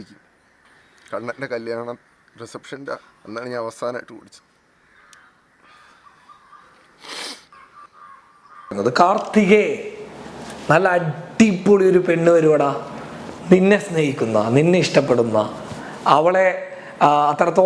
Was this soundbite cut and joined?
yes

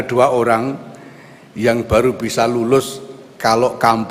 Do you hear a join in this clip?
no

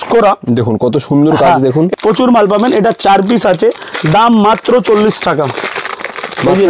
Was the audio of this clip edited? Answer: yes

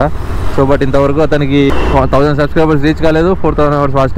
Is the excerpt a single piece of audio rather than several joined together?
no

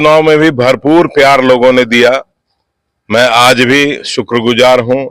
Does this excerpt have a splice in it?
no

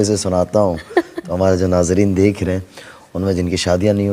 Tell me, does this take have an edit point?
no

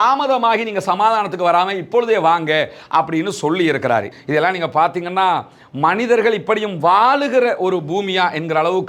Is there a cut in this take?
yes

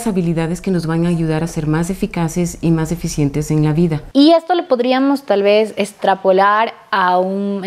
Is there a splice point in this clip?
yes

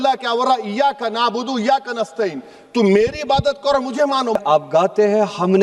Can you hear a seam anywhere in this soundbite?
yes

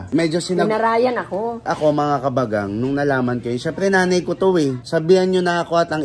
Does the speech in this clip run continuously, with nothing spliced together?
no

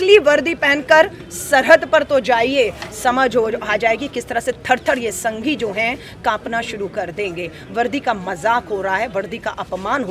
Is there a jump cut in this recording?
no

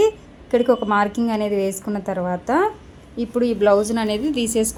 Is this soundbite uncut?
yes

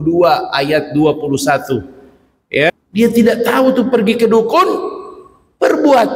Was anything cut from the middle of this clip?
yes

